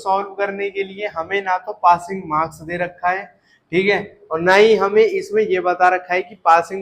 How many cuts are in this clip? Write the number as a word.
zero